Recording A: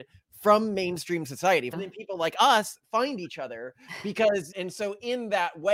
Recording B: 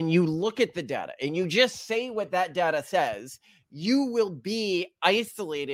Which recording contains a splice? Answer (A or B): A